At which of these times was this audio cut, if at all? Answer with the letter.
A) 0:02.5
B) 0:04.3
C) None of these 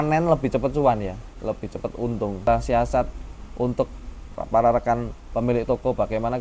A